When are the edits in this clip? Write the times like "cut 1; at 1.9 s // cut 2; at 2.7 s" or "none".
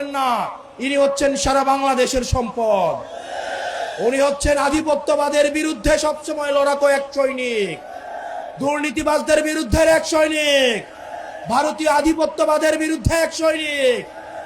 none